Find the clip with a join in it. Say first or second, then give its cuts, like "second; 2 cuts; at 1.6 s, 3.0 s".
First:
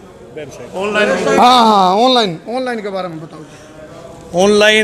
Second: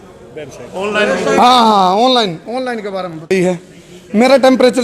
second; 1 cut; at 3.3 s